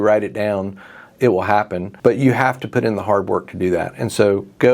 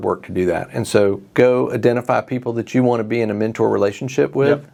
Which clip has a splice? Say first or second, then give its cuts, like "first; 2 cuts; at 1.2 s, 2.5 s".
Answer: first; 1 cut; at 1.8 s